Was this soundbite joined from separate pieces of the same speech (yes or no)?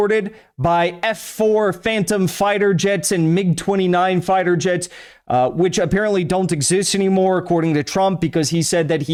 no